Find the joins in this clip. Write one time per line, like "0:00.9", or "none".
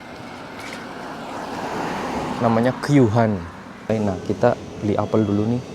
0:03.9

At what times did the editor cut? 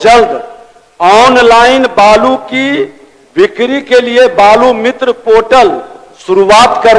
none

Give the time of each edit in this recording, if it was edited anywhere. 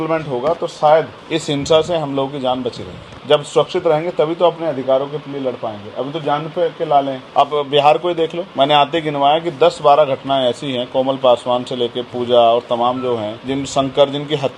none

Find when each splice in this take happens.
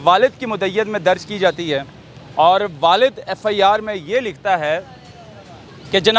none

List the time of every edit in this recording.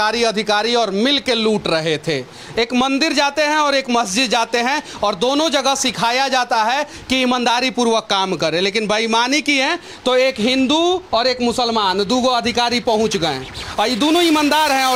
none

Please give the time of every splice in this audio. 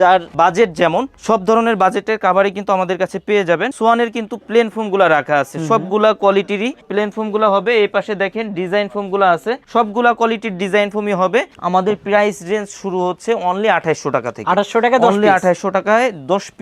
0:03.7
0:11.5

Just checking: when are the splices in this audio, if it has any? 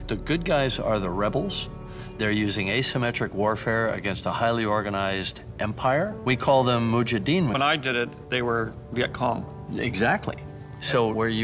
0:06.4
0:07.6

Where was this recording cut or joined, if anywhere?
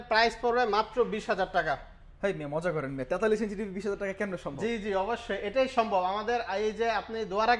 none

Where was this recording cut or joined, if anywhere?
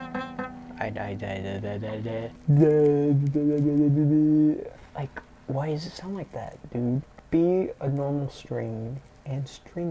none

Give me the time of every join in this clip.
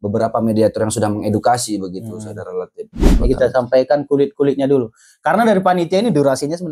0:03.1

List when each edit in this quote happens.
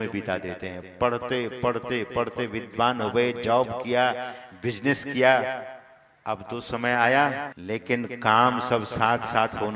0:07.5

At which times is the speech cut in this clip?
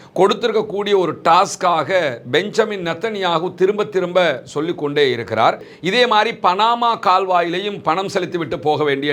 0:05.7

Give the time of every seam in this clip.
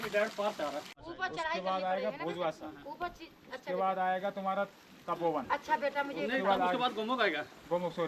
0:01.0

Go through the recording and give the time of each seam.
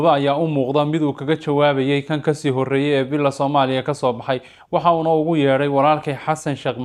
none

